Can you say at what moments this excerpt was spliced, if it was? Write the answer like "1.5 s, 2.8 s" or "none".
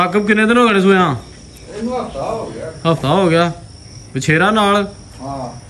none